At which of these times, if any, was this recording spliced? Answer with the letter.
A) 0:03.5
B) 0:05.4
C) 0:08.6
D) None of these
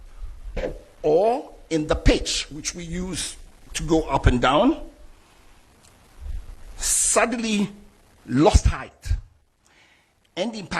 D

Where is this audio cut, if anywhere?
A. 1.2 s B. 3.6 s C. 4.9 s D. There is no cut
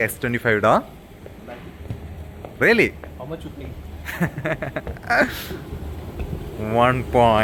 D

